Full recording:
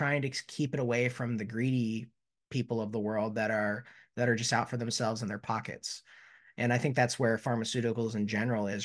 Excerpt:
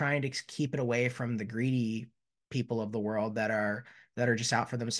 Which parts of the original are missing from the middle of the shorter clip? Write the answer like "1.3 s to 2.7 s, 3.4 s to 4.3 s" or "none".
none